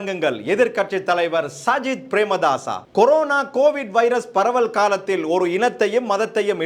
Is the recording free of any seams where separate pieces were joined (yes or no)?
yes